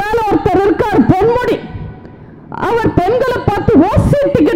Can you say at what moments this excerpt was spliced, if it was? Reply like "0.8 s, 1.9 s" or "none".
none